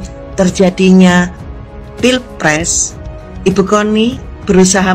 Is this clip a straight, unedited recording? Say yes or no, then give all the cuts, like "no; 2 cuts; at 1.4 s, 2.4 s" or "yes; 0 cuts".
yes; 0 cuts